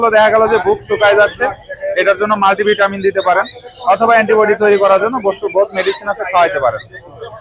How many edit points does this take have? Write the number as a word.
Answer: zero